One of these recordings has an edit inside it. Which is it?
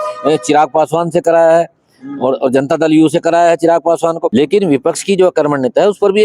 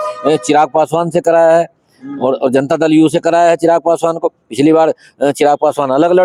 first; 1 cut; at 4.2 s

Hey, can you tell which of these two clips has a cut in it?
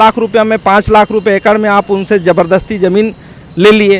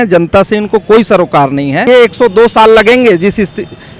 second; 1 cut; at 1.9 s

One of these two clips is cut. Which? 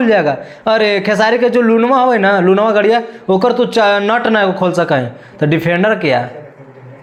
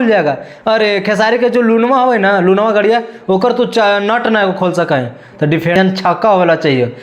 second; 1 cut; at 5.8 s

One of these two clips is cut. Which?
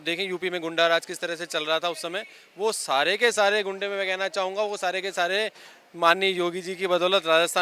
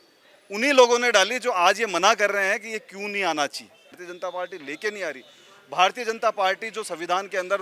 second; 1 cut; at 4.0 s

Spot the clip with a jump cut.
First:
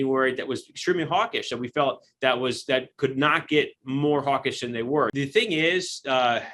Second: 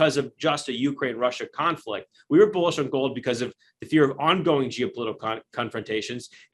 first; 1 cut; at 5.1 s

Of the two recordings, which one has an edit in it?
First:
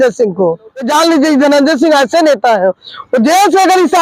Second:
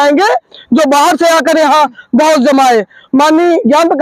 first; 1 cut; at 1.2 s

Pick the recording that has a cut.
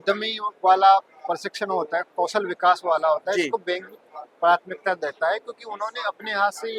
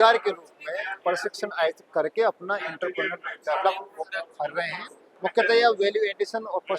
second; 1 cut; at 5.0 s

